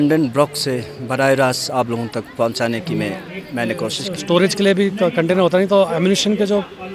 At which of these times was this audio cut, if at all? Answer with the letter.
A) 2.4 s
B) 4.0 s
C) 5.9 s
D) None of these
B